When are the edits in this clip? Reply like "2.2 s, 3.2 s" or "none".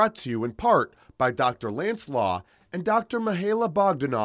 none